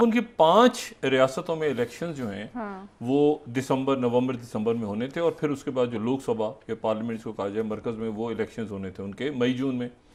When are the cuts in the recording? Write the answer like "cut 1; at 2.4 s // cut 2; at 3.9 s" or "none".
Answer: none